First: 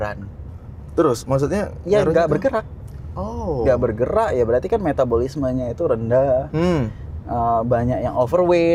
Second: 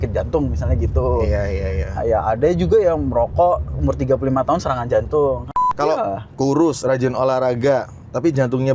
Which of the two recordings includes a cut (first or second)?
second